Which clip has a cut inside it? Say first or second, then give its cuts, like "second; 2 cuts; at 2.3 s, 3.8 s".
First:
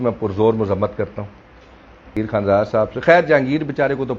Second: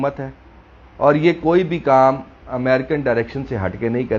first; 1 cut; at 2.1 s